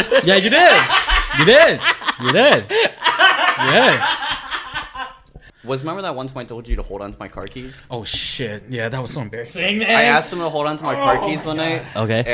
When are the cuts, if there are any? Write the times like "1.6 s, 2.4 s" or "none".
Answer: 5.5 s